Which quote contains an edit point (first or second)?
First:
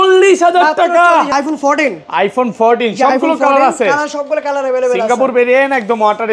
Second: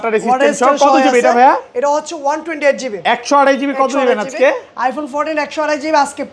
first